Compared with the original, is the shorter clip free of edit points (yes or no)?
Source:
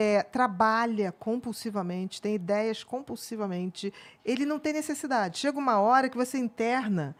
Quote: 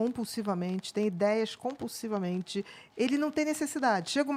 yes